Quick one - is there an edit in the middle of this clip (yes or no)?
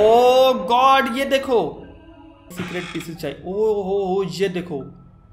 yes